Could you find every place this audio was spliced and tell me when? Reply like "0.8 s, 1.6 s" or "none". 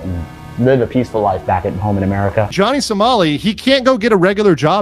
2.5 s

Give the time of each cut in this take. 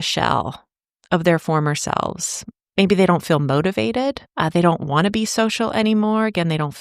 none

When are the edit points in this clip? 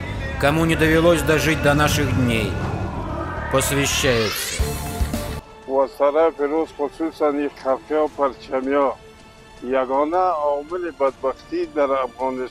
5.3 s

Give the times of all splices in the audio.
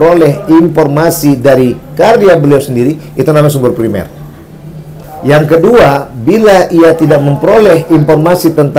5.5 s

